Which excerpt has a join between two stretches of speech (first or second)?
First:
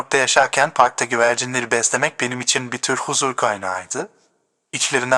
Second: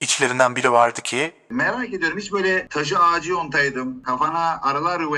second